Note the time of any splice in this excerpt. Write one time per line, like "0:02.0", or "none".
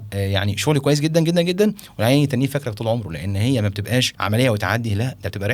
0:04.2